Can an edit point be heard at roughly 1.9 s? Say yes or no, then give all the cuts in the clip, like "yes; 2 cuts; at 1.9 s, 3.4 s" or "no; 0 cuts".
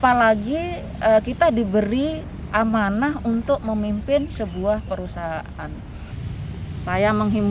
no; 1 cut; at 6.2 s